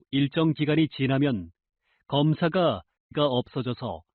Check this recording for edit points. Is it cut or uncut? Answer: cut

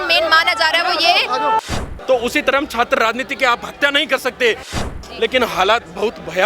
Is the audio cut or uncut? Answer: cut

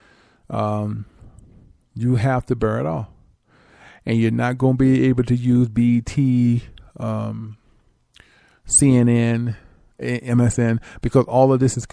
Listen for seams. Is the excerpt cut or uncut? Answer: uncut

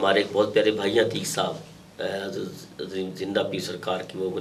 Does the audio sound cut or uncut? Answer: uncut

